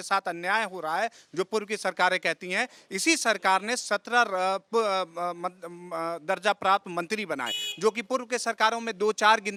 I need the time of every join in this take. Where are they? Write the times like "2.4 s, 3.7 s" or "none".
none